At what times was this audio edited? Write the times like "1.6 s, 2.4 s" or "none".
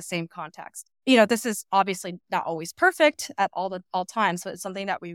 none